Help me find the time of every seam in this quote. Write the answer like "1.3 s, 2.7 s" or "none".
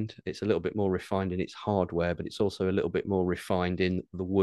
none